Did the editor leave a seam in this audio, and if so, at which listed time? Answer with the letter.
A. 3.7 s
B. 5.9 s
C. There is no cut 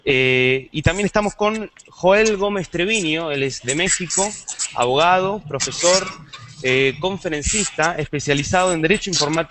B